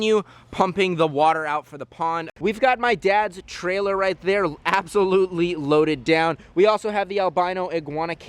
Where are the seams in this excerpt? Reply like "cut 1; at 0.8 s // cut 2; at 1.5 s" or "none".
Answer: cut 1; at 2.3 s